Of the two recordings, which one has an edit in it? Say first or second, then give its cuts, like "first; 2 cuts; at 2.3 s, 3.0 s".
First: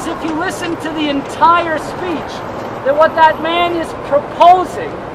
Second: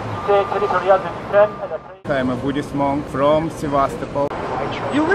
second; 2 cuts; at 1.9 s, 4.3 s